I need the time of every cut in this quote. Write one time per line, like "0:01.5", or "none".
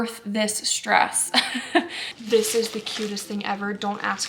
0:02.0